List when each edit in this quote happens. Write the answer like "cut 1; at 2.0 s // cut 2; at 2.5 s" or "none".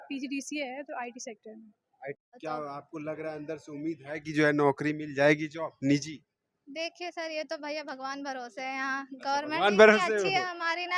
cut 1; at 2.3 s